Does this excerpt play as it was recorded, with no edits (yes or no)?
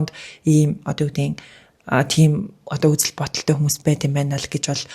yes